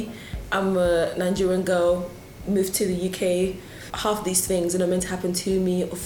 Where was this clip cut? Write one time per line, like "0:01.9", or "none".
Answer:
0:03.9